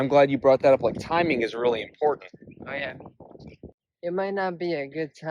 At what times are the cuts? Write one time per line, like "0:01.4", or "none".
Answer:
0:03.7